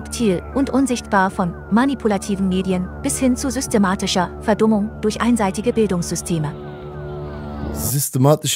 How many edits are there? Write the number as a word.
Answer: zero